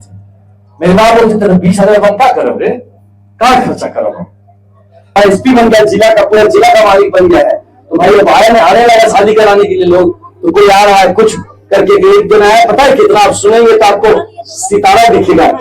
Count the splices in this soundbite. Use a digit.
1